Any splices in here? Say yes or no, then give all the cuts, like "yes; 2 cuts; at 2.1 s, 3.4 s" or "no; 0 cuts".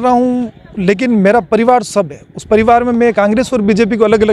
no; 0 cuts